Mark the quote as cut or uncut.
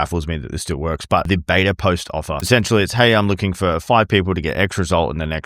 cut